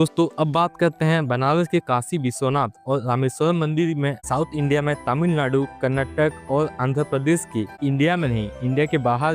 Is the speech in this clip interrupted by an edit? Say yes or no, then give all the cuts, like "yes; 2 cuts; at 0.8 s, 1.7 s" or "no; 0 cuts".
yes; 2 cuts; at 4.2 s, 7.8 s